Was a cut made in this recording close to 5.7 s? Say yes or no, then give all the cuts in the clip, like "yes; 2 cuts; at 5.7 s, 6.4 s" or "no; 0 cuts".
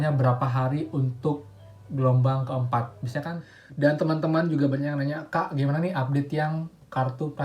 no; 1 cut; at 3.5 s